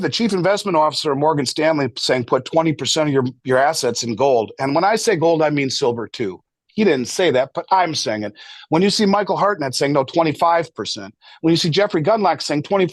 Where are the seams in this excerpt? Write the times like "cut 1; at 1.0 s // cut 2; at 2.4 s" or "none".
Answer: none